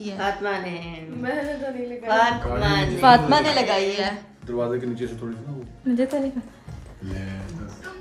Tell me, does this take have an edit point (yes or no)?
no